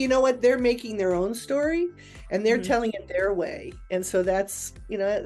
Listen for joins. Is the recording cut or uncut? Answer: uncut